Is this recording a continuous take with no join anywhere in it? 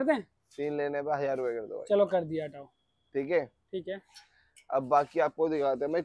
yes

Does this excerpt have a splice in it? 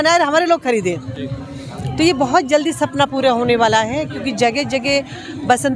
no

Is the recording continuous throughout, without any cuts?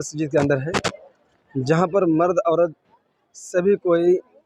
yes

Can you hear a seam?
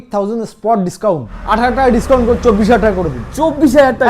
yes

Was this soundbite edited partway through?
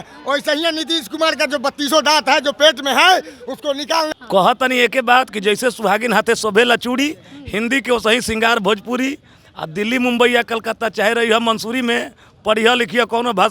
yes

